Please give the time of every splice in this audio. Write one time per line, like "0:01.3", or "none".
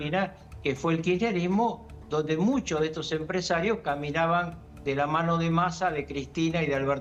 none